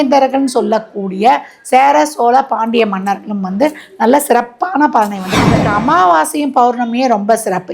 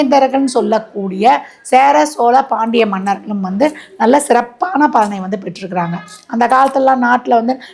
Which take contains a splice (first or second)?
first